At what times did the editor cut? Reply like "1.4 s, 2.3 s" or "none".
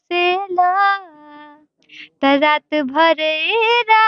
none